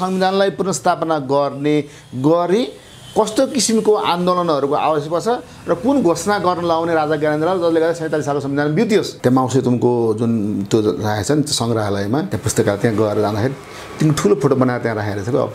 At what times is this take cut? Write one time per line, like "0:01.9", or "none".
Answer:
0:09.1
0:12.4